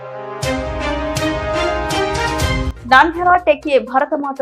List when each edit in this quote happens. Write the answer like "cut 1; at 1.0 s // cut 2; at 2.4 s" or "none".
cut 1; at 2.7 s